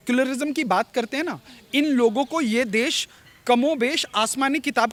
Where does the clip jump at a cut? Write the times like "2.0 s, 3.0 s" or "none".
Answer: none